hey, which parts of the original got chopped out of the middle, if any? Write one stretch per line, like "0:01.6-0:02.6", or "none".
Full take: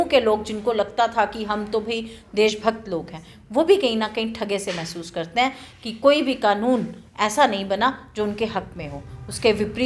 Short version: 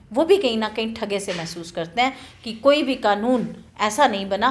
none